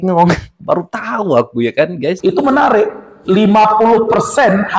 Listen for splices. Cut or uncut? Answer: cut